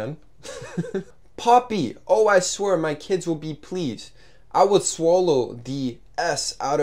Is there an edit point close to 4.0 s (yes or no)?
no